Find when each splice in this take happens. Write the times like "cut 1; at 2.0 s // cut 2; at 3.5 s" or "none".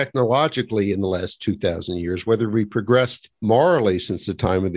cut 1; at 3.3 s